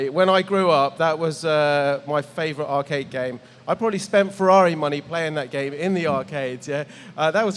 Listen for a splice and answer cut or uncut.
uncut